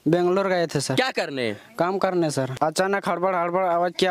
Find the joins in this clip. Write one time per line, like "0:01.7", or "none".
0:02.5